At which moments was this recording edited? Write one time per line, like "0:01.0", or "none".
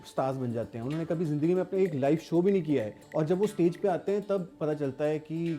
0:03.0